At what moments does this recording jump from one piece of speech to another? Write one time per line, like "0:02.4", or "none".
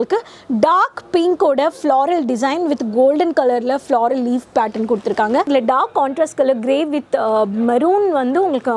0:05.5